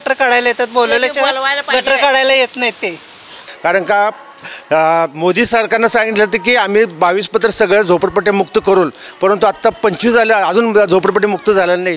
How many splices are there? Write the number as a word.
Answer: one